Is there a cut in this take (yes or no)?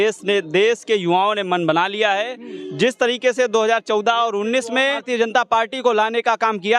yes